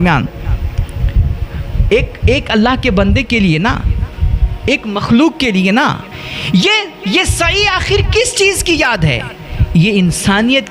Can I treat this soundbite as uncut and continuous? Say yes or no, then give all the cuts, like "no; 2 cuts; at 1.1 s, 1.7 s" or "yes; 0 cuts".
no; 1 cut; at 6.1 s